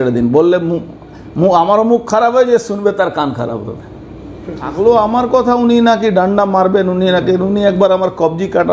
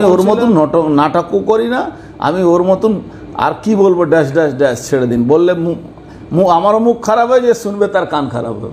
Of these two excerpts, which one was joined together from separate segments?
first; 1 cut; at 4.7 s

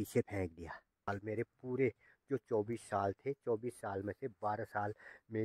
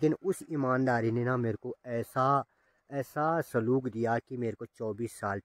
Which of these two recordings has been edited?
first; 1 cut; at 1.1 s

